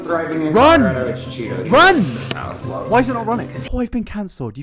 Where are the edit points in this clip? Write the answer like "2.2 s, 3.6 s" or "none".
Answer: 3.6 s